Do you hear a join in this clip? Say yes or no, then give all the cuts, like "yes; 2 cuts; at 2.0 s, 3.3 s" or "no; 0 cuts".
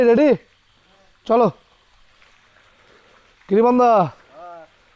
yes; 1 cut; at 2.3 s